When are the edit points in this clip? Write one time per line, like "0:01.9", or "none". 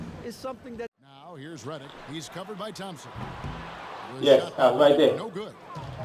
0:00.9

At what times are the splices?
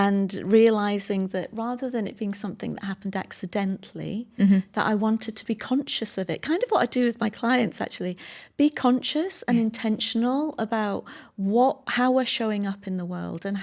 none

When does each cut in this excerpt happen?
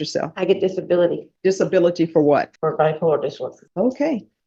0:01.3
0:02.5
0:03.6

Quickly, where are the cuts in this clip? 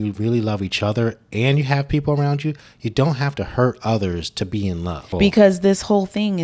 0:05.1

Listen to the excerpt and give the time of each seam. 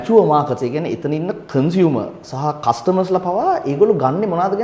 none

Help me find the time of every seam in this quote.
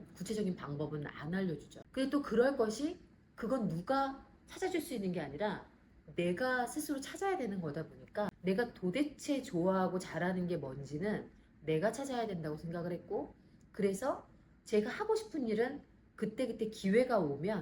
0:01.7
0:08.3

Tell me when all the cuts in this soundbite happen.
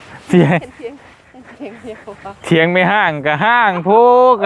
none

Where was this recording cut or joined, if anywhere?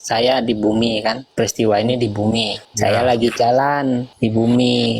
0:01.2
0:02.6
0:04.1

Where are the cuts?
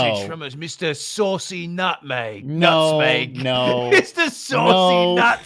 none

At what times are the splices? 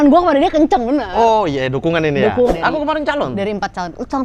0:02.5

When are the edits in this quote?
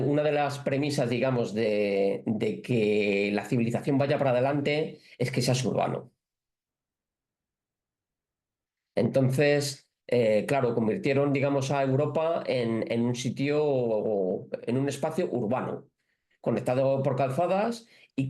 none

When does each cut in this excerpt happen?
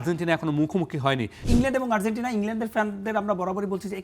0:01.4

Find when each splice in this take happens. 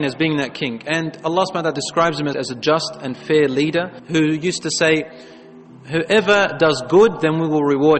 0:02.4

